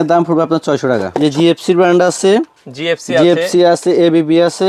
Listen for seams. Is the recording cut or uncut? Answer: cut